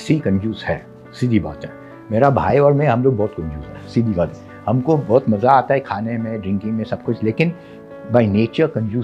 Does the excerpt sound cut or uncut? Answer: uncut